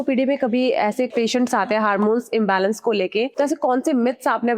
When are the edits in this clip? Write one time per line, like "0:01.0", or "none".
0:01.1
0:03.3